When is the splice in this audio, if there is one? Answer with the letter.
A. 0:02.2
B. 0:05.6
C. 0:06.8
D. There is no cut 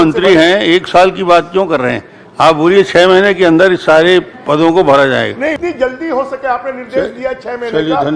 B